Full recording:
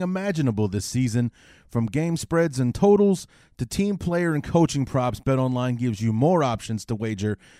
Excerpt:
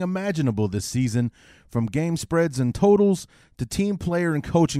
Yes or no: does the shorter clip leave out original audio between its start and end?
no